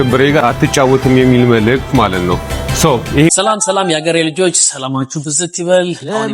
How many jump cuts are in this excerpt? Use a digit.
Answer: 1